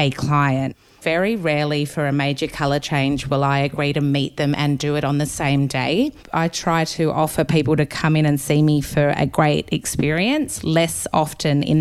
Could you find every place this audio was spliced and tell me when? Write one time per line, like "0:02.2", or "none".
0:00.9
0:06.2